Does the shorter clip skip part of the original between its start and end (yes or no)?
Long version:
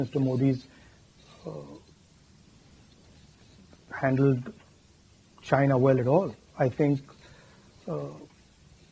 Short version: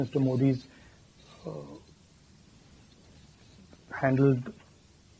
no